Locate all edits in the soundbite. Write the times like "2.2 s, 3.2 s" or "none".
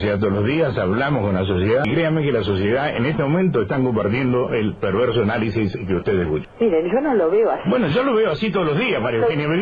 1.8 s